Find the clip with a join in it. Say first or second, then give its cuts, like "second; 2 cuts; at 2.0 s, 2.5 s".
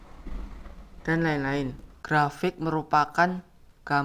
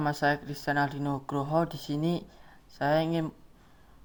first; 1 cut; at 1.9 s